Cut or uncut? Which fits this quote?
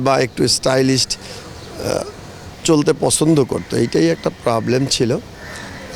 uncut